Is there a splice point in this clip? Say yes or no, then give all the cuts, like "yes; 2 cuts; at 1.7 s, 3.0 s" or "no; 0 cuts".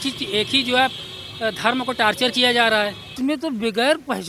yes; 1 cut; at 3.1 s